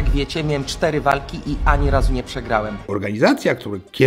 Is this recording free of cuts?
no; 1 cut; at 2.8 s

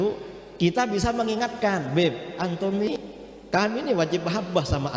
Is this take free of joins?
no; 1 cut; at 2.9 s

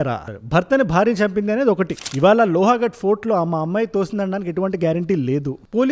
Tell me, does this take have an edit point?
yes; 1 cut; at 2.0 s

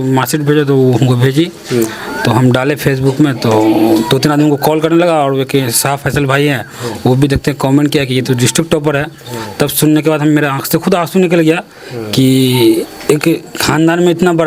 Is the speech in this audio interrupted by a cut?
no; 0 cuts

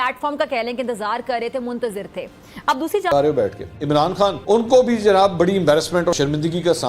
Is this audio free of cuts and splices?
no; 1 cut; at 3.1 s

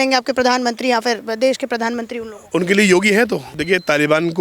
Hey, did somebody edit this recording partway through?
yes; 1 cut; at 3.5 s

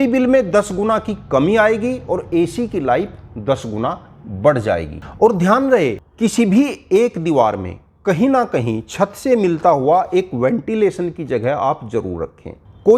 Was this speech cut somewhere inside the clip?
no; 0 cuts

